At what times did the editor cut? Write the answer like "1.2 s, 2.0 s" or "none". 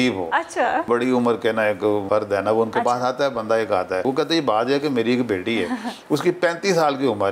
0.9 s, 2.0 s, 4.0 s